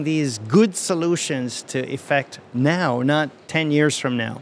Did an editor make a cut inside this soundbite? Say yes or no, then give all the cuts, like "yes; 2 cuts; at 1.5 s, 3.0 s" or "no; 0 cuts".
yes; 1 cut; at 3.4 s